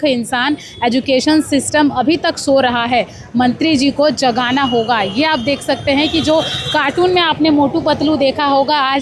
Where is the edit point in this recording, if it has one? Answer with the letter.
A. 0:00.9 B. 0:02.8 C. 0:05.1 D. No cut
D